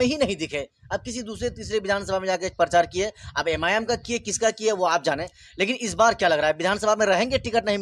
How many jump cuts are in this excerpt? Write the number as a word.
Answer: zero